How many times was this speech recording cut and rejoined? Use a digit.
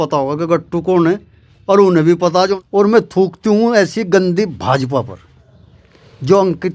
1